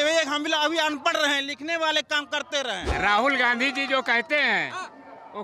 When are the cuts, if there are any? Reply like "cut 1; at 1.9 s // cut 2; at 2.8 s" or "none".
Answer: cut 1; at 2.8 s